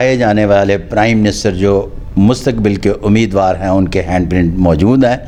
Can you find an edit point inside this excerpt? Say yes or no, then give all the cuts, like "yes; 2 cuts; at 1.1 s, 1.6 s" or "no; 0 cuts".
no; 0 cuts